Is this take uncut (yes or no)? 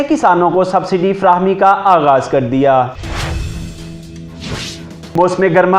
no